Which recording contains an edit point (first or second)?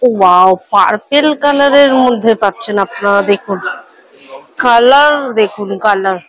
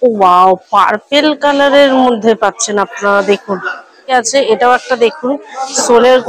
second